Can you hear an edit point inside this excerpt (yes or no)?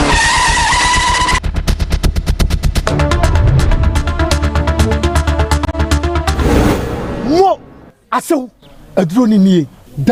no